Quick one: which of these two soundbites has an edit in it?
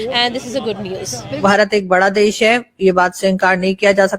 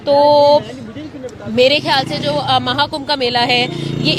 first; 1 cut; at 1.3 s

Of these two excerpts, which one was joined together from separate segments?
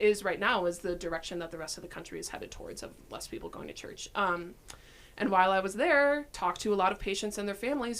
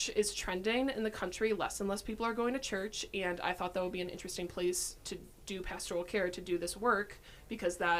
first; 1 cut; at 6.3 s

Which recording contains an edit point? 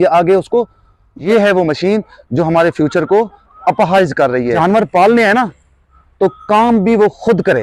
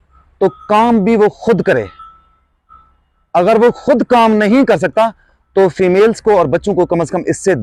first; 2 cuts; at 1.2 s, 4.6 s

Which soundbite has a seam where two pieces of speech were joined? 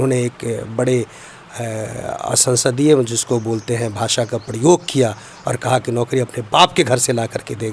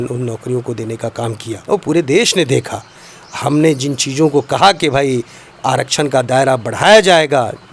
second; 1 cut; at 1.6 s

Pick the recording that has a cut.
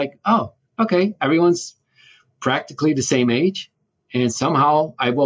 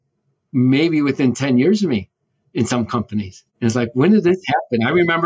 second; 1 cut; at 3.4 s

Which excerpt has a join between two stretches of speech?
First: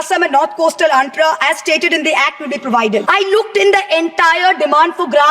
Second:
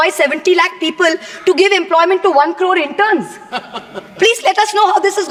first; 1 cut; at 3.0 s

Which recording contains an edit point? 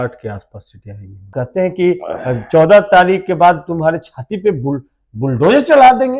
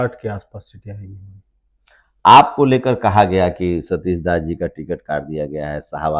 first; 1 cut; at 1.3 s

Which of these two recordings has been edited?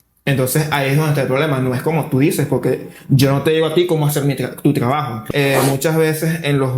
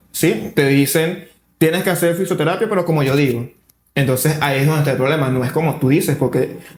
first; 1 cut; at 5.2 s

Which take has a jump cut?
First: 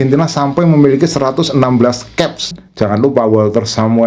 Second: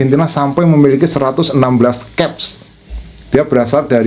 first; 1 cut; at 2.6 s

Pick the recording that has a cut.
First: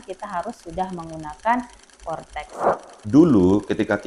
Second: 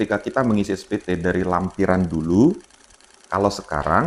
first; 1 cut; at 2.7 s

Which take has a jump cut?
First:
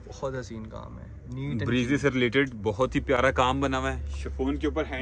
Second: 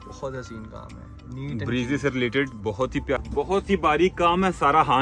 second; 1 cut; at 3.2 s

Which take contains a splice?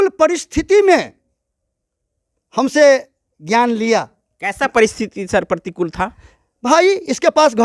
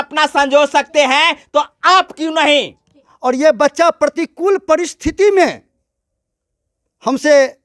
second; 1 cut; at 2.9 s

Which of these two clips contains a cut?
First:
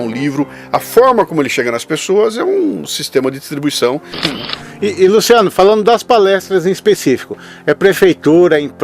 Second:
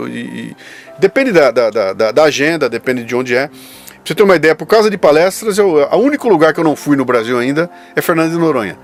first; 1 cut; at 4.1 s

